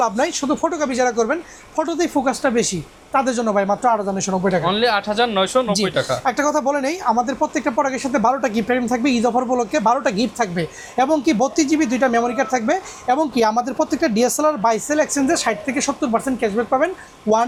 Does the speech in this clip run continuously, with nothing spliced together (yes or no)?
yes